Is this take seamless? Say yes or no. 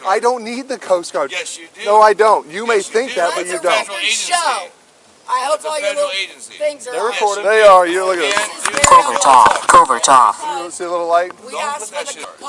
yes